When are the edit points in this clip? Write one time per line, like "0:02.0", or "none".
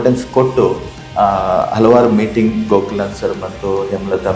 none